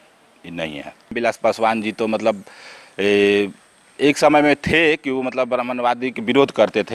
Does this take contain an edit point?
yes; 1 cut; at 1.1 s

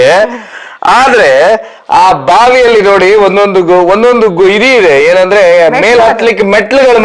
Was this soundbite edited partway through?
no; 0 cuts

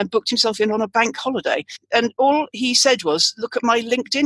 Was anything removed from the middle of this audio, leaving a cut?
yes; 1 cut; at 1.8 s

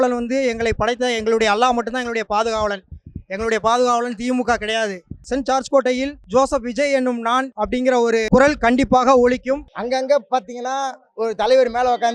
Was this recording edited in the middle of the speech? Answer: yes; 4 cuts; at 5.2 s, 6.2 s, 7.7 s, 9.7 s

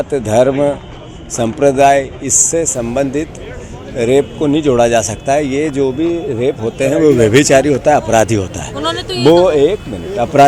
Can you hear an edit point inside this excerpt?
no; 0 cuts

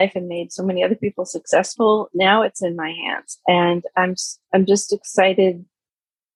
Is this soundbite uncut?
yes; 0 cuts

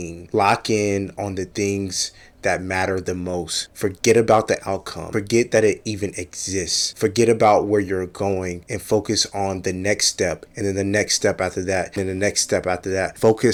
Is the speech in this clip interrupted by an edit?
no; 0 cuts

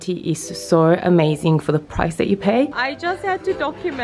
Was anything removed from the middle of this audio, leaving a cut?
yes; 1 cut; at 2.7 s

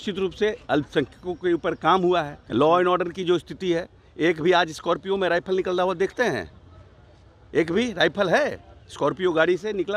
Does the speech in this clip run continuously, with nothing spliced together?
no; 1 cut; at 2.4 s

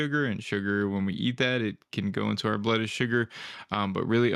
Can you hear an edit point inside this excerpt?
no; 0 cuts

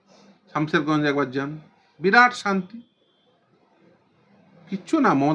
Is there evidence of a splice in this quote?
no; 0 cuts

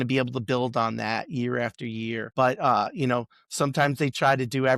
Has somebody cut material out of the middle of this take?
yes; 1 cut; at 2.3 s

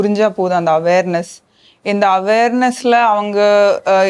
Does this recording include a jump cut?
no; 0 cuts

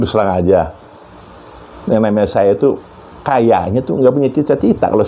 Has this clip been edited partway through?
no; 0 cuts

